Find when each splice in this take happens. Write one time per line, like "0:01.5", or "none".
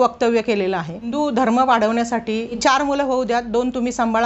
0:01.1
0:02.6